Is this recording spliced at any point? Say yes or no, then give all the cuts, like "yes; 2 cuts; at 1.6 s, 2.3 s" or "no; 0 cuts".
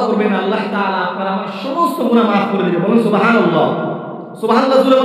yes; 1 cut; at 2.9 s